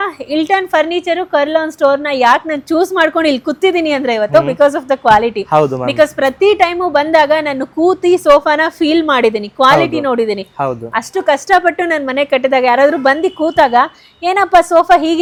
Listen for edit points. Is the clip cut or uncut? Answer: uncut